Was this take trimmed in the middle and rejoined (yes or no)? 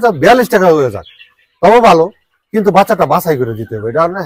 no